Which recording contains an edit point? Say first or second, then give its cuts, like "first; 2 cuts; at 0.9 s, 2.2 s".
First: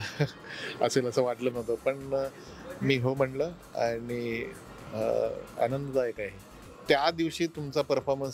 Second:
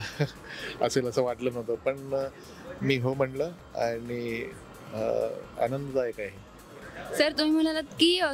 first; 1 cut; at 6.8 s